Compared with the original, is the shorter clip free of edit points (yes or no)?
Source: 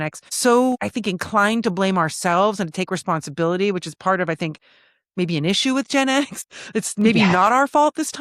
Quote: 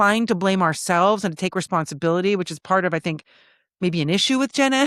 yes